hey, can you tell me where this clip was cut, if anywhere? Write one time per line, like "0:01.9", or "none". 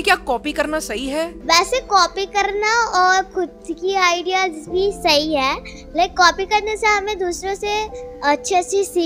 0:01.4